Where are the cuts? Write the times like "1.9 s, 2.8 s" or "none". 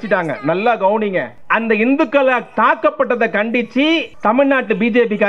1.4 s, 4.1 s